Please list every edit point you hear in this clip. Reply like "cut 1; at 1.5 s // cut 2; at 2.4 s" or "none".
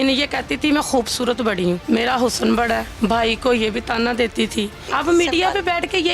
cut 1; at 1.8 s // cut 2; at 2.9 s // cut 3; at 4.9 s